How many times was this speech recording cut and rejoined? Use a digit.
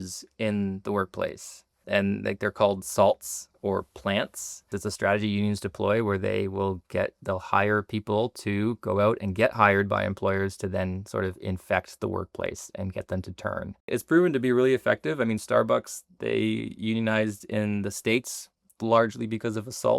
3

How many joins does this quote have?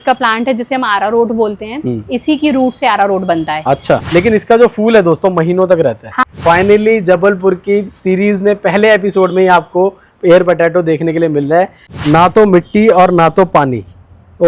3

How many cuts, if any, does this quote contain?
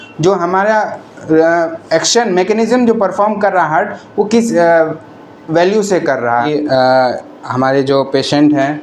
1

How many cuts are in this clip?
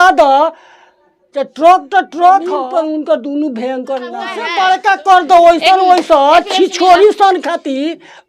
2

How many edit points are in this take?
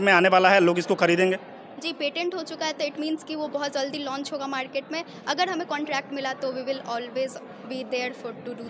0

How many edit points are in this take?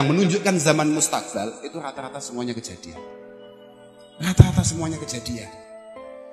1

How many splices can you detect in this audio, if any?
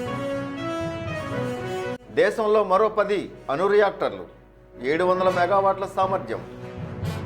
1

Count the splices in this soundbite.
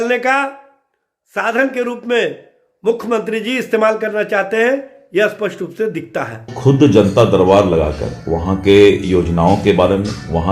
1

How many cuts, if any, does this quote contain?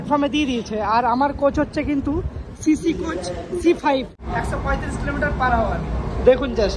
1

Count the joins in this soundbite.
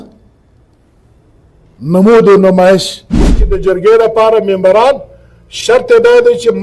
1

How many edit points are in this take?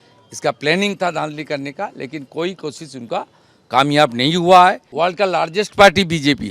1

